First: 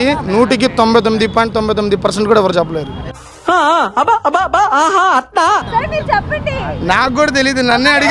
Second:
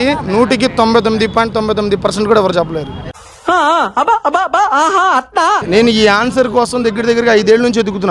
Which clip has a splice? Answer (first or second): second